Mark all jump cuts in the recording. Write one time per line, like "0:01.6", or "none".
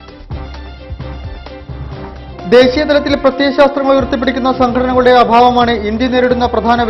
none